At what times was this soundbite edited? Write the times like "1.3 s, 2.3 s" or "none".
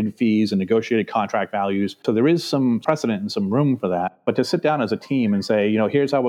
none